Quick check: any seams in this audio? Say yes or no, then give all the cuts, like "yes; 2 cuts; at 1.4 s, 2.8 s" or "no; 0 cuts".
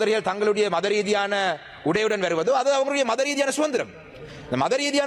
no; 0 cuts